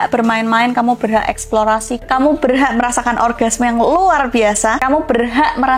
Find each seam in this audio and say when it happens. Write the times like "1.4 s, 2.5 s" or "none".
none